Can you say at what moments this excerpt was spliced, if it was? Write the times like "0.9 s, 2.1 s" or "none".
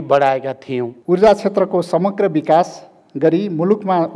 0.9 s